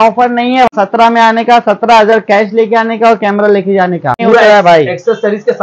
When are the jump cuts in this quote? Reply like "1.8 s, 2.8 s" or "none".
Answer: 0.7 s, 4.2 s